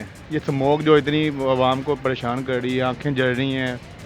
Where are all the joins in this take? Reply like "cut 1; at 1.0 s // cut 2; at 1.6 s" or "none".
none